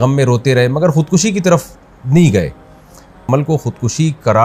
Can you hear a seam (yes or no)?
yes